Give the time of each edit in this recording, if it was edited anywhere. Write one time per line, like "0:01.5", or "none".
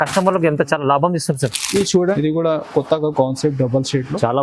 0:02.1